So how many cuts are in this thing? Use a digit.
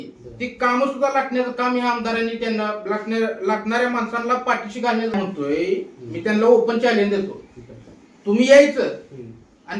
1